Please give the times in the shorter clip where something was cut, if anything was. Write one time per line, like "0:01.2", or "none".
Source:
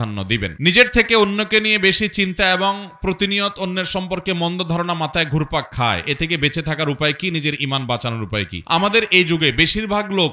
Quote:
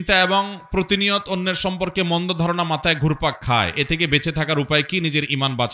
none

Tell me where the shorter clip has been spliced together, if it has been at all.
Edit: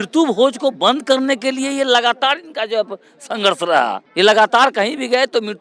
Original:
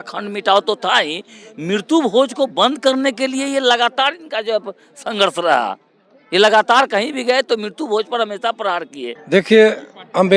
0:04.0

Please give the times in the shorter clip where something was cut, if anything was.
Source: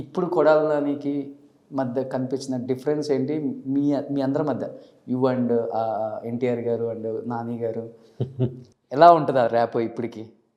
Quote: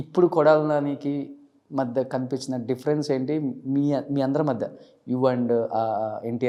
none

